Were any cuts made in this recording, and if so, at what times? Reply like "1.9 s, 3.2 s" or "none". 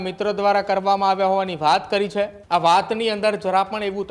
2.4 s